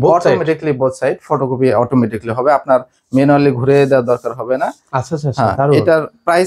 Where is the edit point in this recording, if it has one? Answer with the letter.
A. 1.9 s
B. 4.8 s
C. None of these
C